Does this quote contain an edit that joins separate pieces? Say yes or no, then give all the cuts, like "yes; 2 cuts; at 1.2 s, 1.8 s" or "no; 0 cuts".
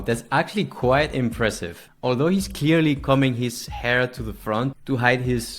no; 0 cuts